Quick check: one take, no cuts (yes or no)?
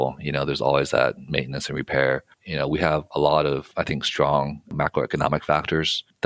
no